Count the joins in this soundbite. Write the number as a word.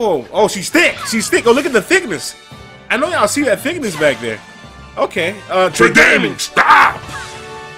zero